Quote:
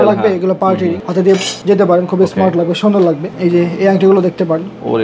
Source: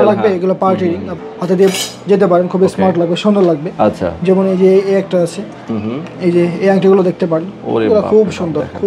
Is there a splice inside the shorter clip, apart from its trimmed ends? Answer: yes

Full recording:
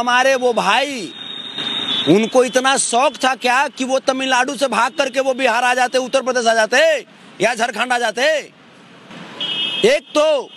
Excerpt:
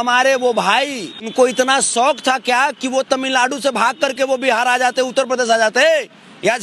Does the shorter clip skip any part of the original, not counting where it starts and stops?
yes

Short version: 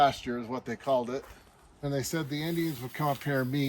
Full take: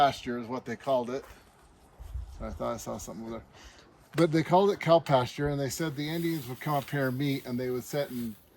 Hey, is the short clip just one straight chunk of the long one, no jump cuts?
no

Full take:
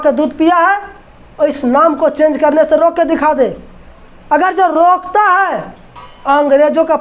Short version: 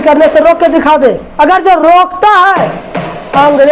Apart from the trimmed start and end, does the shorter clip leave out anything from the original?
yes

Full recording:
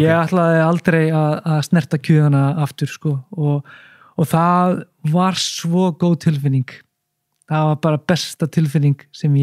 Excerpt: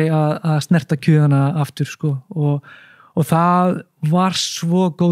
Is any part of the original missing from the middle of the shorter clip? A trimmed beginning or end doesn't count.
no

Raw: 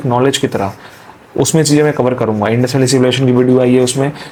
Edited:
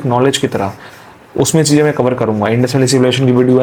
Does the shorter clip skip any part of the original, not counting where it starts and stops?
no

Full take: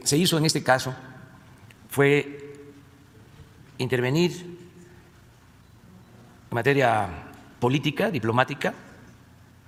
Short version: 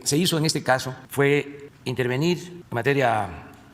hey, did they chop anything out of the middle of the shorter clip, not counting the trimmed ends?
yes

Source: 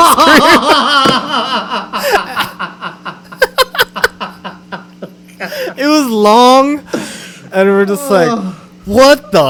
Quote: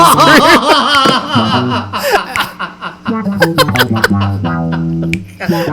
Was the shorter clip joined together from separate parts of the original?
no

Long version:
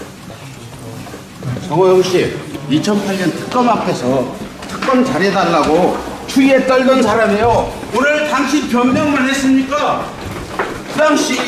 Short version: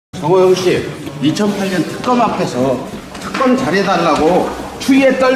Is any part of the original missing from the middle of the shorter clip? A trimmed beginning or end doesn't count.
no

